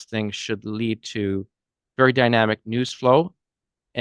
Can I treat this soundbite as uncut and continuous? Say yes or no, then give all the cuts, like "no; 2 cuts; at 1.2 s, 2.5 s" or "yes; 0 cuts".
yes; 0 cuts